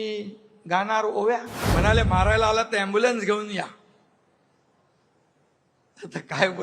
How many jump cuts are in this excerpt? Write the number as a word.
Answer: one